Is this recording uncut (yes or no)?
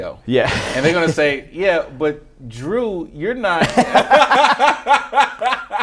yes